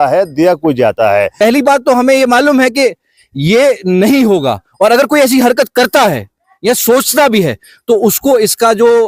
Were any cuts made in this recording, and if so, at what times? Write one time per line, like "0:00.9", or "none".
0:01.3